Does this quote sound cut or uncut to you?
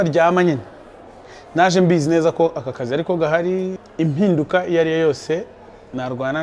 cut